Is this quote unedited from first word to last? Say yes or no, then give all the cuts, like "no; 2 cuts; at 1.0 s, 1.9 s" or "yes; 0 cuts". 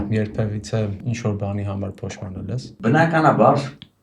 no; 1 cut; at 1.0 s